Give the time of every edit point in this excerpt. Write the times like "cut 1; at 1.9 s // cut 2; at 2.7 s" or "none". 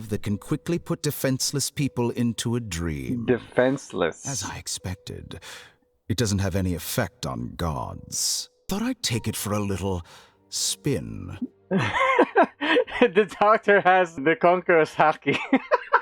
cut 1; at 8.7 s // cut 2; at 14.2 s